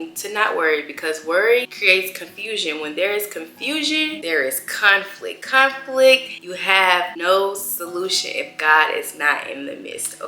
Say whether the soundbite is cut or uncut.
cut